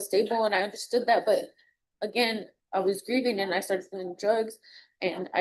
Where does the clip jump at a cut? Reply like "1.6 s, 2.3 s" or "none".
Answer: none